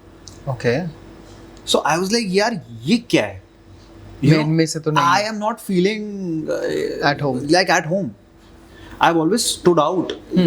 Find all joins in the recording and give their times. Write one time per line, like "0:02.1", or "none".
none